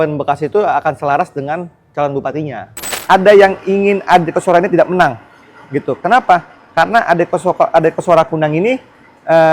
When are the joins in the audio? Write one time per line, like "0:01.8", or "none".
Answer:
0:03.0